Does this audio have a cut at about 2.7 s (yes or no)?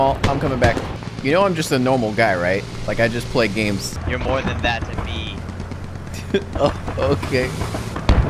yes